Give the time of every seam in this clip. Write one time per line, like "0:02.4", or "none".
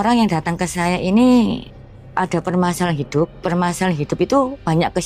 none